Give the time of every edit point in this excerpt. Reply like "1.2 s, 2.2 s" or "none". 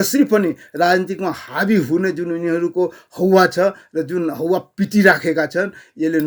none